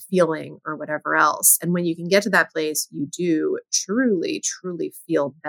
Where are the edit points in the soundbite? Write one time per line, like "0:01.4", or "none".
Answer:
none